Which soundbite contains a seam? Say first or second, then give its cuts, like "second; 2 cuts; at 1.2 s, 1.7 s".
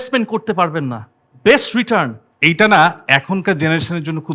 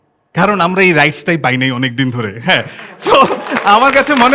first; 1 cut; at 2.2 s